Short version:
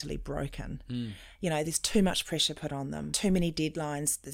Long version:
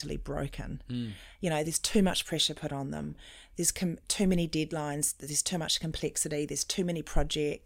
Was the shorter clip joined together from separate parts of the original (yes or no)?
yes